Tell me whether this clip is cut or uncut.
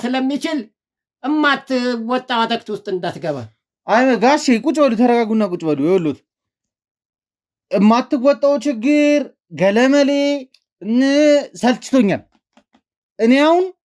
uncut